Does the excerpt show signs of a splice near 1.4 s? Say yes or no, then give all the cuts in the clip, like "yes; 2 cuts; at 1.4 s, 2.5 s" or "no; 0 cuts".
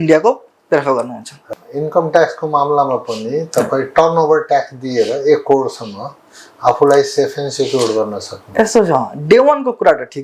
yes; 1 cut; at 1.4 s